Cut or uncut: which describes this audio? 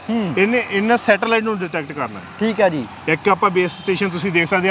uncut